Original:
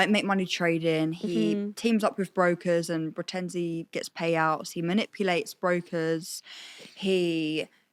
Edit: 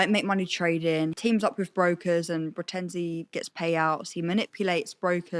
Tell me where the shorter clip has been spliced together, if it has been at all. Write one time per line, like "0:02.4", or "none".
0:01.2